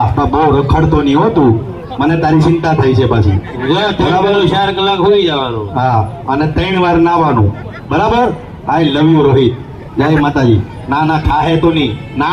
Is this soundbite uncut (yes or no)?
yes